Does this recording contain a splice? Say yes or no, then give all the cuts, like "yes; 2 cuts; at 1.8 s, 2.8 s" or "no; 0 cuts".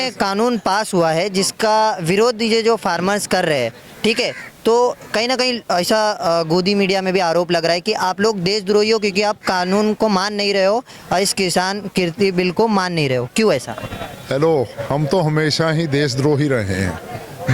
no; 0 cuts